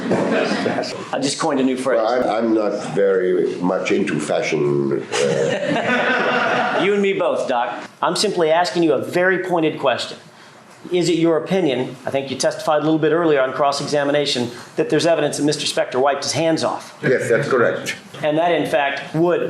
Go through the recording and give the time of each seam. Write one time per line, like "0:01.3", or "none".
0:00.9
0:02.2
0:07.8
0:18.1